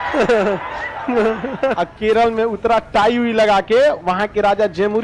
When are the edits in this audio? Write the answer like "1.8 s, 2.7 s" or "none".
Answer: 1.7 s